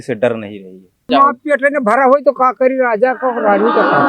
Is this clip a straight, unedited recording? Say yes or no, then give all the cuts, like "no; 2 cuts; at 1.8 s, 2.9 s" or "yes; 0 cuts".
no; 1 cut; at 1.1 s